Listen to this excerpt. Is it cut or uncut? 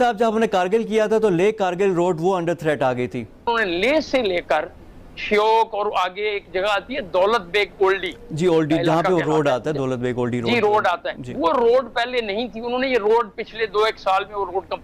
cut